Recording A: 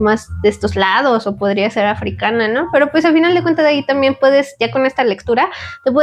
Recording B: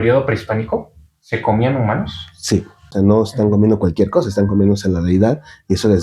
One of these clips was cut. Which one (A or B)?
B